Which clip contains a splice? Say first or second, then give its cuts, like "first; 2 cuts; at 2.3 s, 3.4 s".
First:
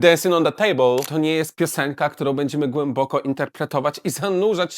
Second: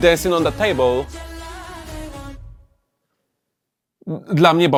first; 1 cut; at 1.1 s